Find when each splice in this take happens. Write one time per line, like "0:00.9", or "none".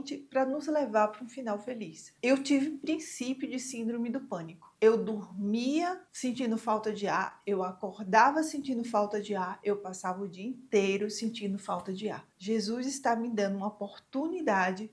0:02.1
0:12.3

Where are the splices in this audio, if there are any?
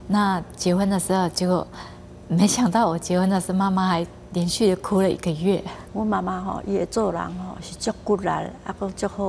0:05.8

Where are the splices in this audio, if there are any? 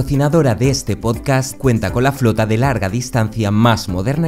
none

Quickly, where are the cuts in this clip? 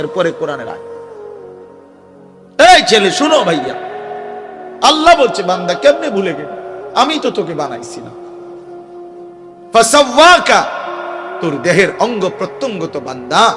none

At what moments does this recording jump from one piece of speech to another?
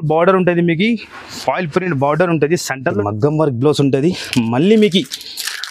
0:03.0

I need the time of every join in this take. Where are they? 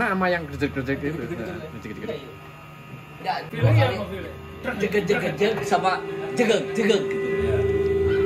0:03.5

